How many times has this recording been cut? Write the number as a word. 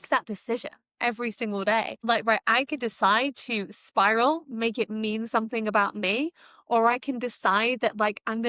one